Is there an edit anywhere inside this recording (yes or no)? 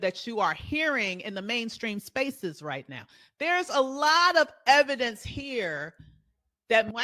no